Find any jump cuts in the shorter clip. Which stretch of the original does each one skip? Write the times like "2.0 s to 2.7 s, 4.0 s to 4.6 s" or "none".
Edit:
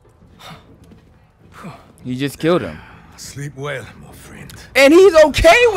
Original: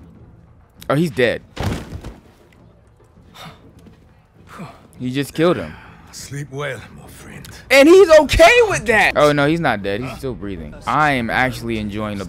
none

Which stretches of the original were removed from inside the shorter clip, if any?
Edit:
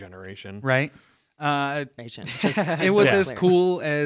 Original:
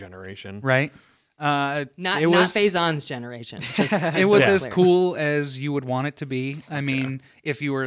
2.0 s to 3.3 s

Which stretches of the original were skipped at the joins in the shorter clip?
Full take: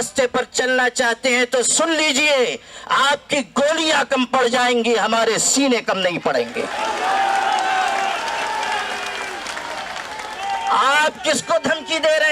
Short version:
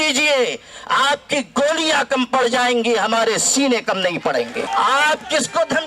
6.7 s to 10.6 s

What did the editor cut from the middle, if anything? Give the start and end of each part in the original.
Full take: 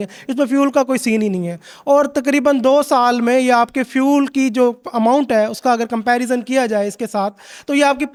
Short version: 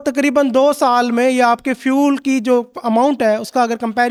none

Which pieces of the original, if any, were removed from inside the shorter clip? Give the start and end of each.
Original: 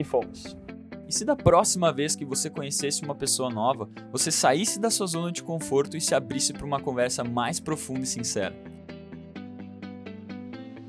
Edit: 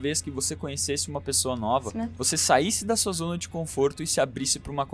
none

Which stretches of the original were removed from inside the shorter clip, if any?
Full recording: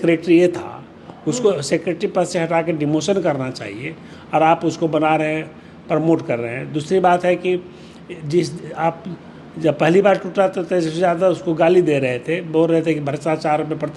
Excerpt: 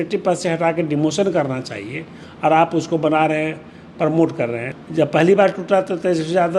6.6 s to 9.4 s

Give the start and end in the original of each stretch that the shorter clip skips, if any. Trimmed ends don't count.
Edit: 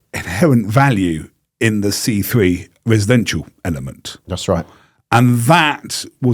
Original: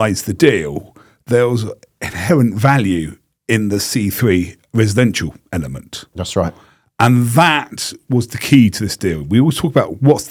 none

